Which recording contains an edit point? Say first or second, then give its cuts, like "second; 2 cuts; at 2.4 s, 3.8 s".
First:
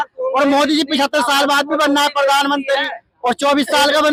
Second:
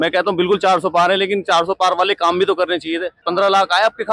second; 1 cut; at 3.2 s